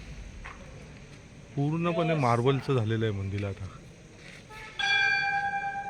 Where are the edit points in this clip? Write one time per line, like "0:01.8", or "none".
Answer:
none